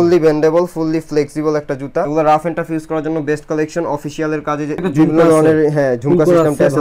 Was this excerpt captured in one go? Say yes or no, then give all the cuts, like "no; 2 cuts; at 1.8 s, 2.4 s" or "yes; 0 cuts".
no; 2 cuts; at 2.1 s, 4.8 s